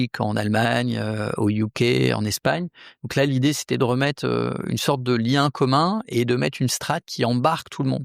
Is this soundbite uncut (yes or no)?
yes